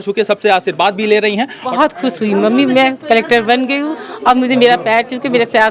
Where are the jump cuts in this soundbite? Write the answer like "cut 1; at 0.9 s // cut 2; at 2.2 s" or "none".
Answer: cut 1; at 1.7 s